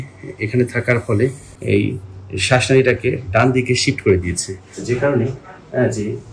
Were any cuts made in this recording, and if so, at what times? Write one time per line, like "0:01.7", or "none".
0:01.4
0:04.7